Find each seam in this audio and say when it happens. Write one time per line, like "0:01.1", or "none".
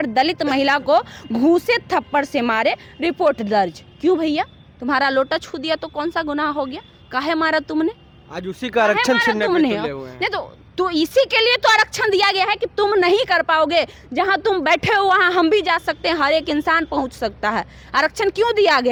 none

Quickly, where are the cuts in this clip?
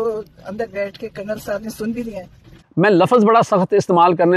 0:02.6

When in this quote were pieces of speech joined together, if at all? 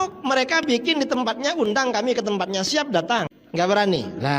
0:03.4

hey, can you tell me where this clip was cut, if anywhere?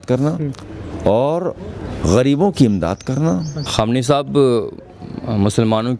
0:03.6

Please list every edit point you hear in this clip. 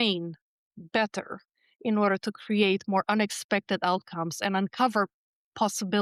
none

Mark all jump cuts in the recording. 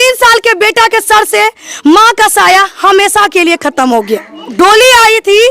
0:04.5

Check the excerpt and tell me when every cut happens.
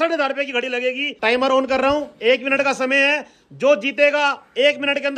0:01.1

